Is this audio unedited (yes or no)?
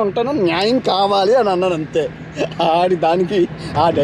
yes